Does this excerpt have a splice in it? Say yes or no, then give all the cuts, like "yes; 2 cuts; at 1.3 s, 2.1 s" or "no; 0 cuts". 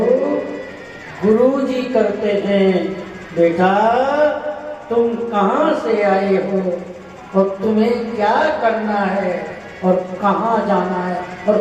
no; 0 cuts